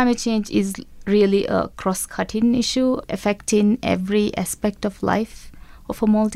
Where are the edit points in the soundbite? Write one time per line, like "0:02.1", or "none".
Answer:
0:03.1